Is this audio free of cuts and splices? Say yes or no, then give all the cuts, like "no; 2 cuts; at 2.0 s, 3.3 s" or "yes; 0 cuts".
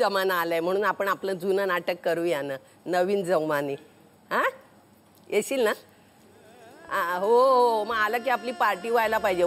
yes; 0 cuts